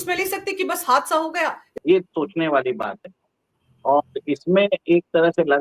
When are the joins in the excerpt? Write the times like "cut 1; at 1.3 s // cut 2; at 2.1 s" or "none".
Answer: cut 1; at 1.7 s